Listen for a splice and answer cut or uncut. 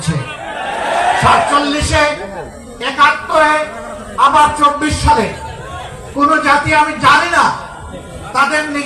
uncut